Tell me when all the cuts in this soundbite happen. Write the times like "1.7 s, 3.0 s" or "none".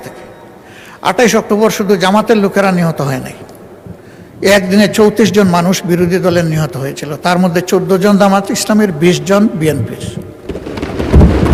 none